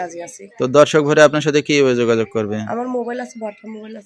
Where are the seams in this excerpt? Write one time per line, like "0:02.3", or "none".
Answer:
none